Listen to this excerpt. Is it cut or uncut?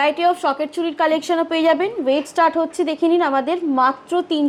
uncut